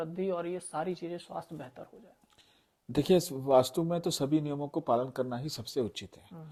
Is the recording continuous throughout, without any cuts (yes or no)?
yes